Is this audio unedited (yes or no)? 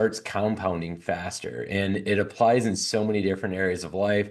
yes